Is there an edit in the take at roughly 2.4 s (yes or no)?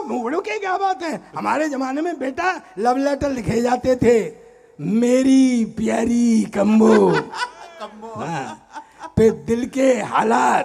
no